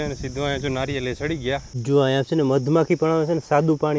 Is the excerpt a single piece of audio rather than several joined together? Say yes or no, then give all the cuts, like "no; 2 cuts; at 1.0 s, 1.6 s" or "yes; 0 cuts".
no; 1 cut; at 1.7 s